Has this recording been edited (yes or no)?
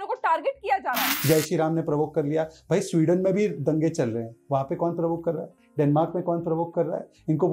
yes